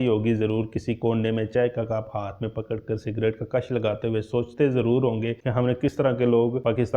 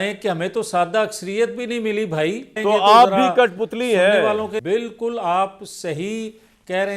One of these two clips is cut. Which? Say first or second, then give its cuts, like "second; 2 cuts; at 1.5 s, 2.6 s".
second; 2 cuts; at 2.5 s, 4.6 s